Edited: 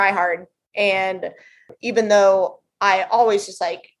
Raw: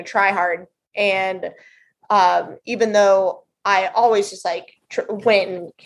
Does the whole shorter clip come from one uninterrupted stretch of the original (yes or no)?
no